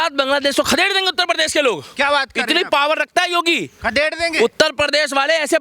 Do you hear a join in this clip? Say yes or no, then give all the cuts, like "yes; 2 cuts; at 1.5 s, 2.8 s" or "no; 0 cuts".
no; 0 cuts